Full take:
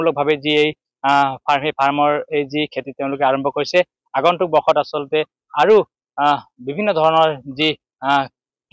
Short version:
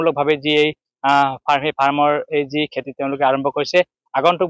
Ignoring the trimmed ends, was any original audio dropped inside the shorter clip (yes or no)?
no